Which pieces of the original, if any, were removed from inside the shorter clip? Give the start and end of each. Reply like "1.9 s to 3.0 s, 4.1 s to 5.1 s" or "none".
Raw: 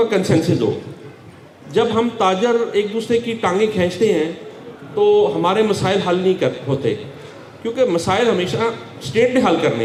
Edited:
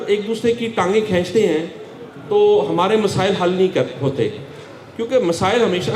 none